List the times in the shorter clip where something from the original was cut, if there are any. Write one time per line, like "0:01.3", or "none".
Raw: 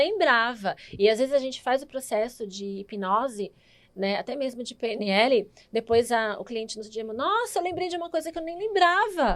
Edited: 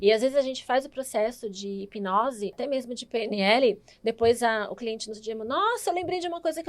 0:02.6